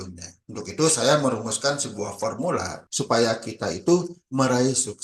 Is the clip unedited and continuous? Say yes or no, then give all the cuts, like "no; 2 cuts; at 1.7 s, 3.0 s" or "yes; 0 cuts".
no; 1 cut; at 2.8 s